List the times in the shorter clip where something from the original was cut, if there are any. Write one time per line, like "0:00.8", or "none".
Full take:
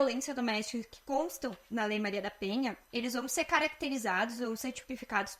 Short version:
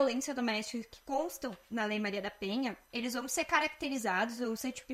none